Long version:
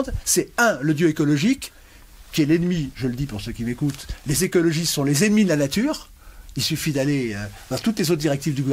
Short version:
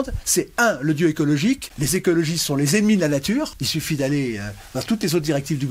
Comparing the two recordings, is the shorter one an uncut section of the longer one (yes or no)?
no